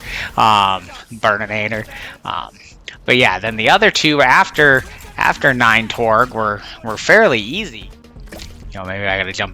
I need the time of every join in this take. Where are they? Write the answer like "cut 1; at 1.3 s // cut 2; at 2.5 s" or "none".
cut 1; at 7.6 s